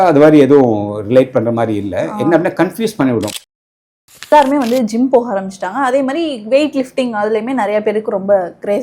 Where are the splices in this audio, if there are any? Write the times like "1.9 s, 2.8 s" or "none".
3.8 s